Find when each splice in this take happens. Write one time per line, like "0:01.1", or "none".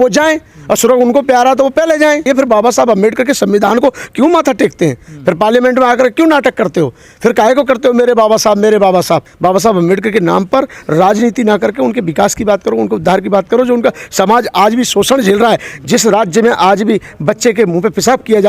0:02.3
0:09.3